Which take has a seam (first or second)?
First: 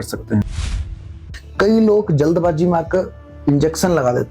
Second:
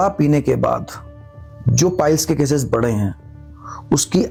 first